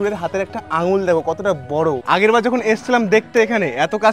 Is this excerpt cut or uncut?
cut